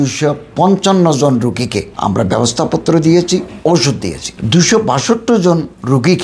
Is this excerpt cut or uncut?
uncut